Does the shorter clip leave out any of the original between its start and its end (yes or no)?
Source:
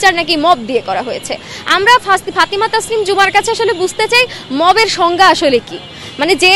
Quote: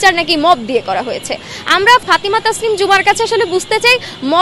yes